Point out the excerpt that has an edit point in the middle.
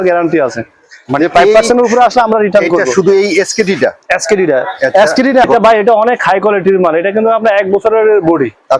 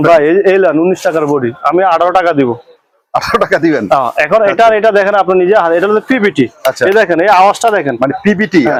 first; 1 cut; at 5.5 s

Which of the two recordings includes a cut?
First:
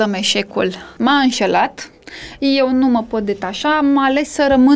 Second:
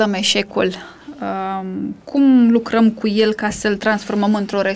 first; 1 cut; at 0.9 s

